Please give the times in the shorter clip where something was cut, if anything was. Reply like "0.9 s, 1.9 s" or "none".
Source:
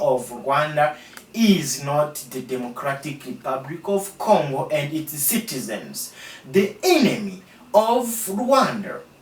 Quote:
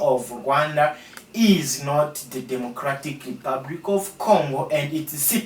none